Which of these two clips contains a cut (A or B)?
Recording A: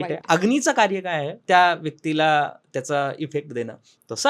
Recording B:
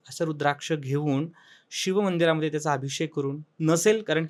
A